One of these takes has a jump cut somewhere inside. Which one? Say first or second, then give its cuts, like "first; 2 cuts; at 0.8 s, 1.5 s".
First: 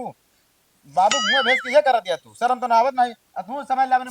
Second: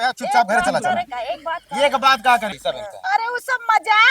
second; 1 cut; at 2.6 s